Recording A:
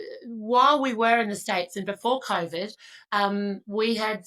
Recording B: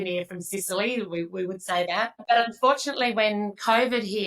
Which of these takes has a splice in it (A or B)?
B